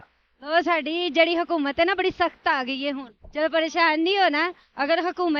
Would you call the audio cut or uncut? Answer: cut